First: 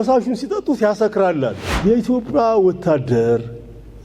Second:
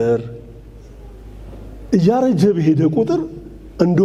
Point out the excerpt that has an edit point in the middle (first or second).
first